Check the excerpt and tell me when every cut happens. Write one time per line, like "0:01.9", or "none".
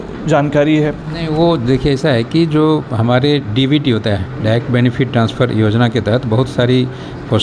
none